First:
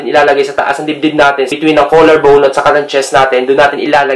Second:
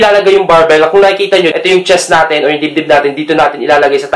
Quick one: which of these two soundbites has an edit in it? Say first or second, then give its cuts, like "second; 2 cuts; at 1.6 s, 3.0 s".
first; 1 cut; at 1.5 s